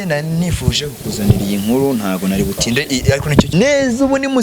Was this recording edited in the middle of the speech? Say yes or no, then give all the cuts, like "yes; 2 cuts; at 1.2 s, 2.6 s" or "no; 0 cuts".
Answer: yes; 1 cut; at 3.5 s